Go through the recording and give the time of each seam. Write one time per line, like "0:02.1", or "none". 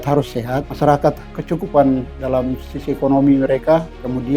0:01.4